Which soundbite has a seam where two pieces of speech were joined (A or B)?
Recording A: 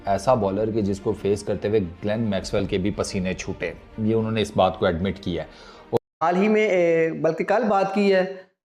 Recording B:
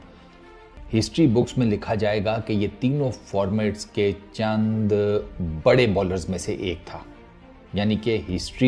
A